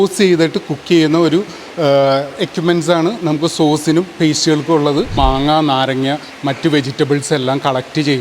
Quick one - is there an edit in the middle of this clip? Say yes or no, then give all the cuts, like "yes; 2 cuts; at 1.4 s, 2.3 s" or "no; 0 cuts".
yes; 1 cut; at 5.1 s